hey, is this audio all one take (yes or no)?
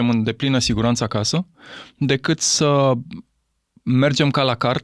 yes